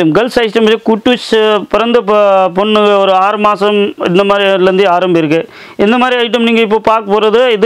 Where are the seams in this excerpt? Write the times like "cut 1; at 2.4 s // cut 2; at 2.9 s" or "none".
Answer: none